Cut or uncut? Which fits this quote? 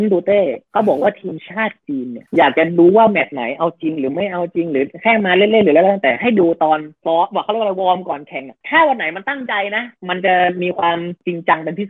uncut